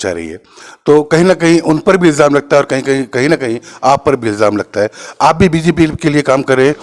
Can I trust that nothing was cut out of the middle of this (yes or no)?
yes